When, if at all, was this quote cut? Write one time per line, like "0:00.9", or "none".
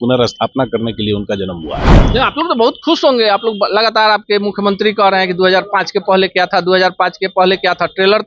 none